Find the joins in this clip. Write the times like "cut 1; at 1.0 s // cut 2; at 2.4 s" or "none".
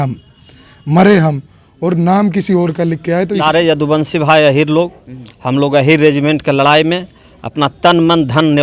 cut 1; at 3.4 s

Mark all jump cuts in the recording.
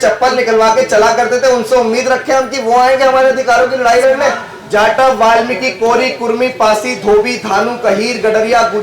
cut 1; at 4.5 s

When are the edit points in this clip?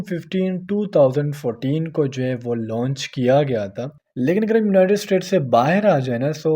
cut 1; at 3.9 s

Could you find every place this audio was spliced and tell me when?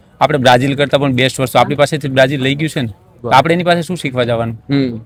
none

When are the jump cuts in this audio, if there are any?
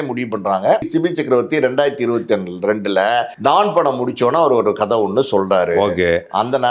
cut 1; at 0.9 s // cut 2; at 3.3 s

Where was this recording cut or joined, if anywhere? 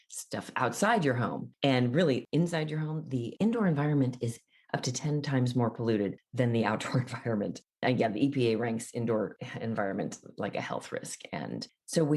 cut 1; at 1.4 s // cut 2; at 7.8 s // cut 3; at 9.4 s

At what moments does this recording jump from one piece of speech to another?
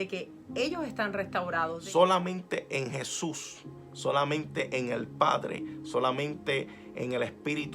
cut 1; at 1.8 s

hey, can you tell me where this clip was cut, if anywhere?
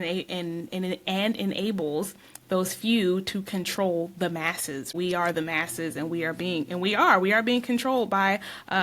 cut 1; at 4.9 s

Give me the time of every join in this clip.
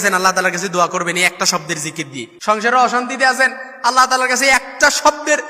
cut 1; at 2.3 s

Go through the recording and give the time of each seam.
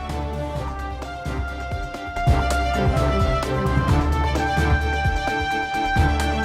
cut 1; at 2.1 s

